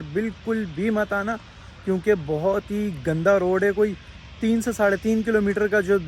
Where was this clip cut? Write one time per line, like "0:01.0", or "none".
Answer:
none

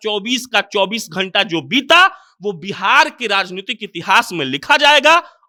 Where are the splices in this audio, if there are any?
none

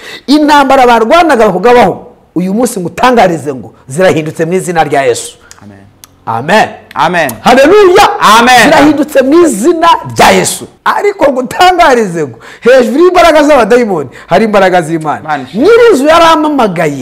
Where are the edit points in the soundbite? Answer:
0:10.7

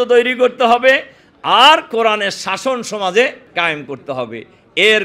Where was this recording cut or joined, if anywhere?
0:03.4

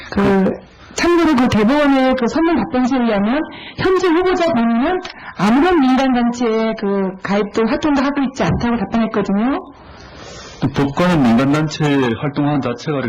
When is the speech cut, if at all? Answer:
0:05.9

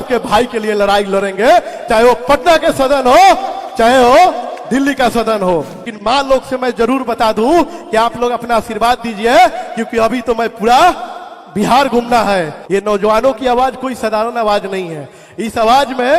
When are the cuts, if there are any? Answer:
none

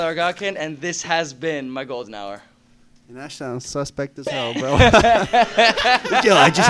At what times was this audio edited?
none

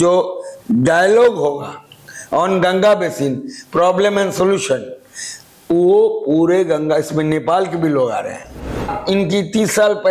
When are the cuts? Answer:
0:08.9

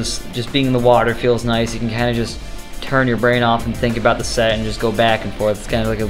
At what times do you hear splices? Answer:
none

